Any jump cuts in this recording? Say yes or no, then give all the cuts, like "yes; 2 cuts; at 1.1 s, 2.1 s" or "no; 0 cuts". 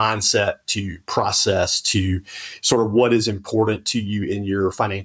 no; 0 cuts